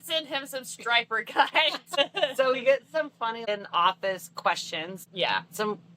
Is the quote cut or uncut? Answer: cut